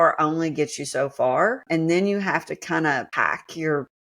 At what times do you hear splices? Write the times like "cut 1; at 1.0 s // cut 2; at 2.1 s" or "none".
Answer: cut 1; at 1.6 s // cut 2; at 3.1 s